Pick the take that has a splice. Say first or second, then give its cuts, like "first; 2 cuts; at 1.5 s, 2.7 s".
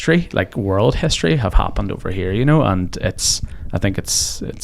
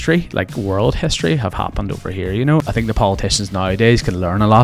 second; 1 cut; at 2.6 s